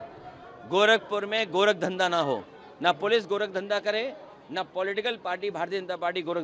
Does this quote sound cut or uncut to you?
uncut